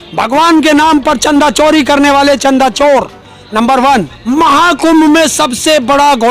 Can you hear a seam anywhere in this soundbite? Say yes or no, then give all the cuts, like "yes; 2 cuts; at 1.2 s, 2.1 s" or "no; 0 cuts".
yes; 1 cut; at 4.2 s